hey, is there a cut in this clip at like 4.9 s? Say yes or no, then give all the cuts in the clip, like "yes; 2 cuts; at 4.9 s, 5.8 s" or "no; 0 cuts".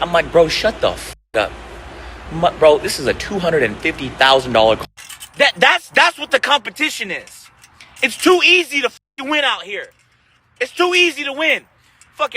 yes; 1 cut; at 4.9 s